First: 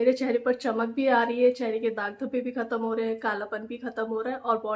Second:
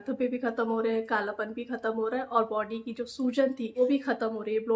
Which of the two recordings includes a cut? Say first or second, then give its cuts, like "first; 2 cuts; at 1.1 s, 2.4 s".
second; 1 cut; at 3.8 s